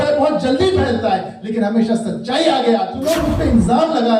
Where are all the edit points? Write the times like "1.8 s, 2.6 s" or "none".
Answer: 3.0 s

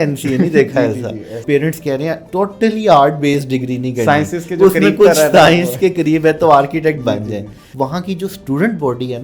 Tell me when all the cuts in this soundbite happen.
1.4 s, 2.2 s, 7.6 s

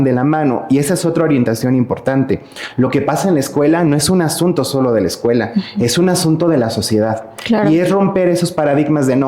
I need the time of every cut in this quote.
none

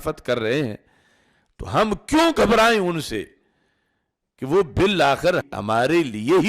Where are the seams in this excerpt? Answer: 5.5 s

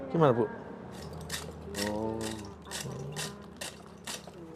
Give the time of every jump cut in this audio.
1.0 s

